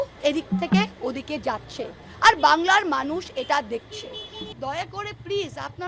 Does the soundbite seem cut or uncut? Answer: cut